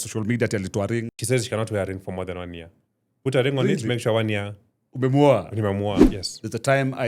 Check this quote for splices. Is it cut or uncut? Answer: cut